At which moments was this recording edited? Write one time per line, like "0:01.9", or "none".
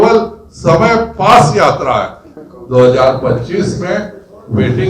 0:02.3